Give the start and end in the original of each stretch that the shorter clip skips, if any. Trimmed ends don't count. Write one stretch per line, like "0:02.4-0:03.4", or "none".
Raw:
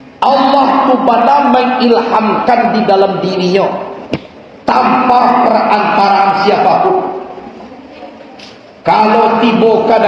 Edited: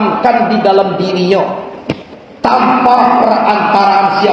none